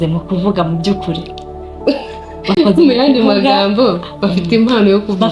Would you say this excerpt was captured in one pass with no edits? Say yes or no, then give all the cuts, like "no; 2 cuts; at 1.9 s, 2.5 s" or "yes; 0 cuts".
yes; 0 cuts